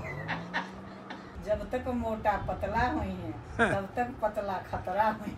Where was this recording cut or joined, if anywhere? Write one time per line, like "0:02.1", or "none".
none